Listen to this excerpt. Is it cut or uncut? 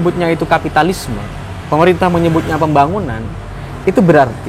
uncut